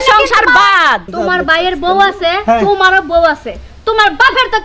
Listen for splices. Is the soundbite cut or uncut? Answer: cut